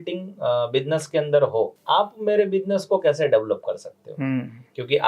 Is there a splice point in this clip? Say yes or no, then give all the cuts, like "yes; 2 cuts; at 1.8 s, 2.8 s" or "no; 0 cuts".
yes; 1 cut; at 1.8 s